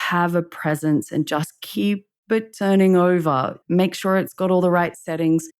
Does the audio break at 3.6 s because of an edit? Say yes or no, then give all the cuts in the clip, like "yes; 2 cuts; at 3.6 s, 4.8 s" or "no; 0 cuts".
yes; 1 cut; at 3.6 s